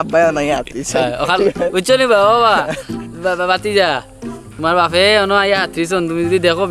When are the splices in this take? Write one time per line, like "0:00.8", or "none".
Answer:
none